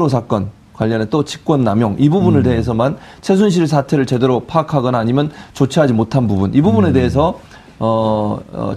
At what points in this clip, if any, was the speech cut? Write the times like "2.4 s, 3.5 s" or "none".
5.5 s